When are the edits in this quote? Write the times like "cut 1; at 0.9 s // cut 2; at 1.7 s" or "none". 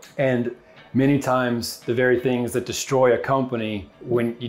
none